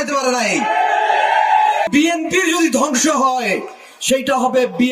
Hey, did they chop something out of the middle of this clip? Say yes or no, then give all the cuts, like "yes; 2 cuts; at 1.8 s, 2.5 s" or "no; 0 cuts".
yes; 1 cut; at 1.9 s